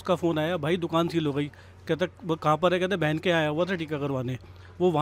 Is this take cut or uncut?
uncut